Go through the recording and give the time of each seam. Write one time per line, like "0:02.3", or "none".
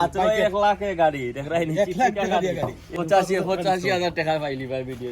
0:02.9